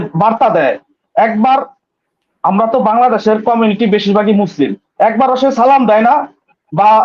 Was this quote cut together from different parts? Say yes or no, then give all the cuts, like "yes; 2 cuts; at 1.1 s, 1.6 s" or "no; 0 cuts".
no; 0 cuts